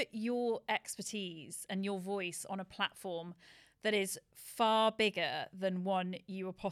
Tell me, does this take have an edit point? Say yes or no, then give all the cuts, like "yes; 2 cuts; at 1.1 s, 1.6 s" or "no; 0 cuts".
no; 0 cuts